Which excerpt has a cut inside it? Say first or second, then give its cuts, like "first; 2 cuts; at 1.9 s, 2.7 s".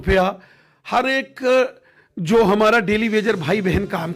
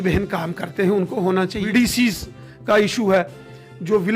second; 1 cut; at 1.6 s